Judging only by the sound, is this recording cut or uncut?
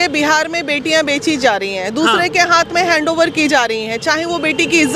uncut